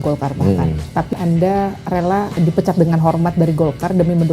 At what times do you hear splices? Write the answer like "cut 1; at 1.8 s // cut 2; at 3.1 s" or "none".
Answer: cut 1; at 1.1 s // cut 2; at 2.4 s